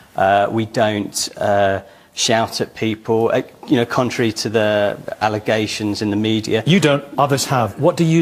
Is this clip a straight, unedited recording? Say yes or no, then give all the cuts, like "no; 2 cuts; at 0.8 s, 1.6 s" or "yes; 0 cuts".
yes; 0 cuts